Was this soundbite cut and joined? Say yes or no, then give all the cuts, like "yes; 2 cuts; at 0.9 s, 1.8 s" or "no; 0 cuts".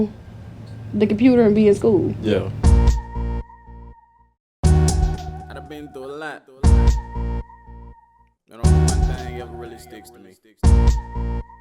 yes; 1 cut; at 2.6 s